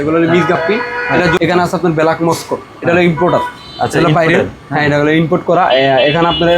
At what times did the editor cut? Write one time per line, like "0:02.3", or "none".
0:01.4

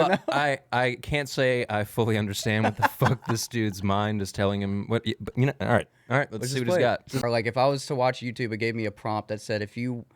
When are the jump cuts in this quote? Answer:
0:07.2

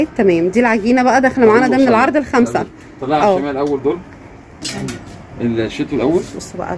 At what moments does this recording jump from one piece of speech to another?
none

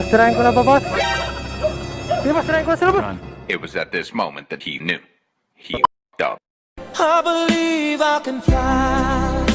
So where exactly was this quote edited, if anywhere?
0:06.5

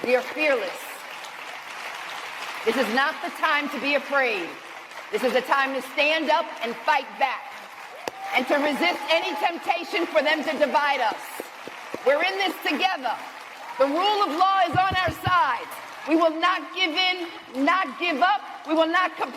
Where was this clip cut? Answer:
none

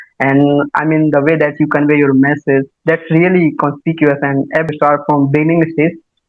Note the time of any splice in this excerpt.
0:04.7

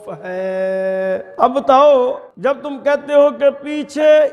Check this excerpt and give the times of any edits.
0:01.3
0:02.3

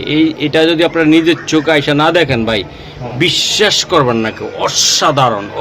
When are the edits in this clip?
none

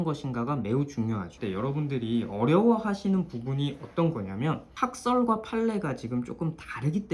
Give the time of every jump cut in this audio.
0:01.3
0:04.7

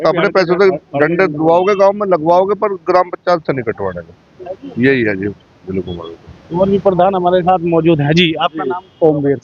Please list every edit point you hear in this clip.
none

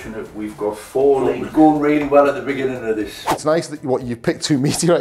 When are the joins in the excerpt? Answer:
0:01.4
0:03.2

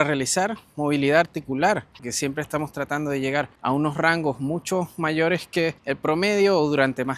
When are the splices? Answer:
0:02.0
0:03.5
0:05.8

